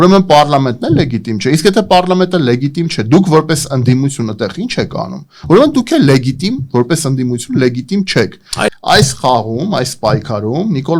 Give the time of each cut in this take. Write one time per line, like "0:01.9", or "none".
0:08.7